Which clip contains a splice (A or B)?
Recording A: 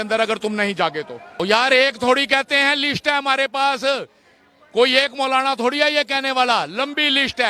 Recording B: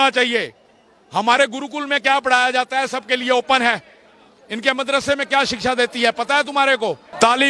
A